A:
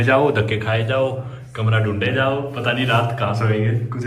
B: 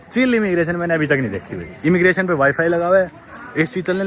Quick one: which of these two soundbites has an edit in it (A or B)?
B